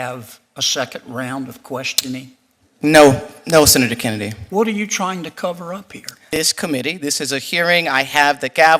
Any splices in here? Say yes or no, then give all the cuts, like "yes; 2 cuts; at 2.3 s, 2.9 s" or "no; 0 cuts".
yes; 1 cut; at 6.4 s